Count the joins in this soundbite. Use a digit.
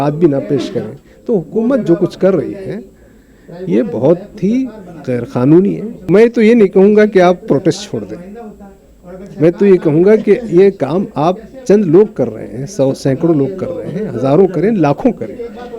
1